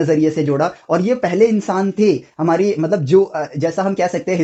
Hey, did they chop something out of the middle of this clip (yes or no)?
no